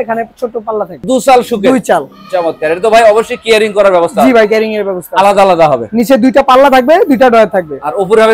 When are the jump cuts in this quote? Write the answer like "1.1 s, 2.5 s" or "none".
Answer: 1.0 s, 5.9 s